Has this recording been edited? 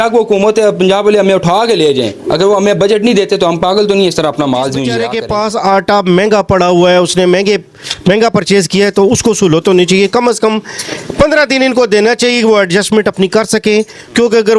yes; 1 cut; at 5.1 s

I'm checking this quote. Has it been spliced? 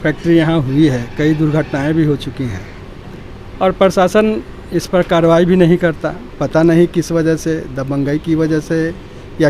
no; 0 cuts

